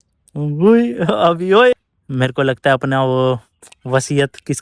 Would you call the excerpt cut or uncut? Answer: cut